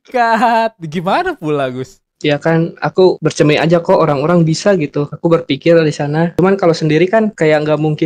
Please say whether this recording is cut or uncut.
cut